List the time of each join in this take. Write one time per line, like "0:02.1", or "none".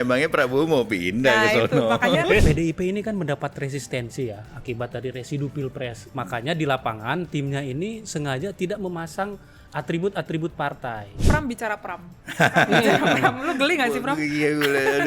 0:02.4
0:06.0
0:11.2